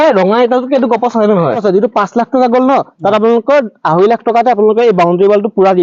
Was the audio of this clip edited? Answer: yes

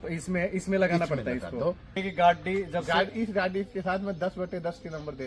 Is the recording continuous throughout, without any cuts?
no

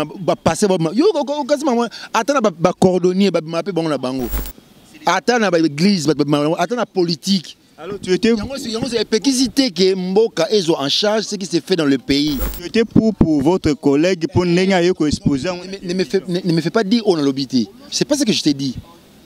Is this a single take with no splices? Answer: yes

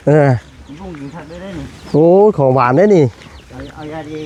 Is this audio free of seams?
yes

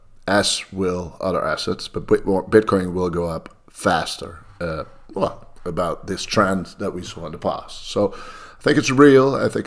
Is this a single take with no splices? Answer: yes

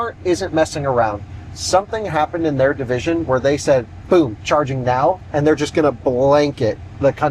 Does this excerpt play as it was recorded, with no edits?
yes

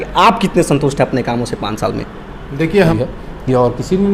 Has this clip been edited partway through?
yes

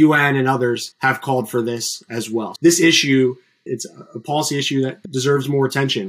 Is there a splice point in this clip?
yes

